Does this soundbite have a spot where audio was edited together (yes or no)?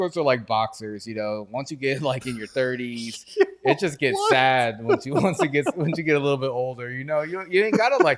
no